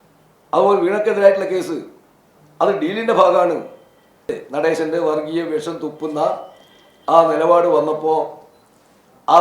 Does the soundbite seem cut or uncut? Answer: cut